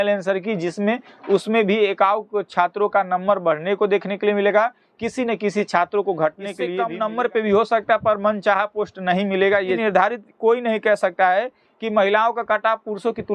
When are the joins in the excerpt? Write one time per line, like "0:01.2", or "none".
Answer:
0:06.6
0:09.8